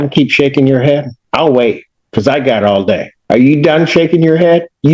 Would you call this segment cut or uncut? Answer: cut